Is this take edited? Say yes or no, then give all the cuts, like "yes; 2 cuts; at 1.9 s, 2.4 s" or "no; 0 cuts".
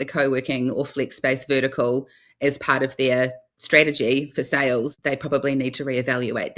yes; 1 cut; at 5.0 s